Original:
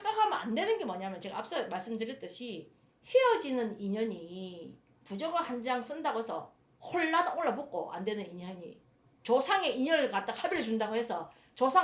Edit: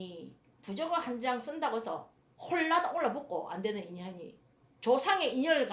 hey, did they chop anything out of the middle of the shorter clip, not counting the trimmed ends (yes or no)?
no